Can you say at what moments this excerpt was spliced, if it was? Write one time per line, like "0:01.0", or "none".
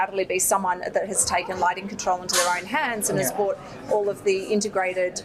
none